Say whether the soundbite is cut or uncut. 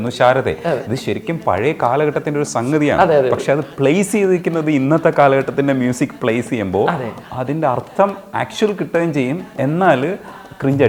uncut